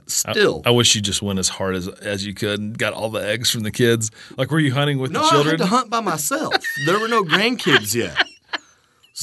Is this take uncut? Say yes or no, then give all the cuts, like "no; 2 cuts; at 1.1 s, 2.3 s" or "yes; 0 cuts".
yes; 0 cuts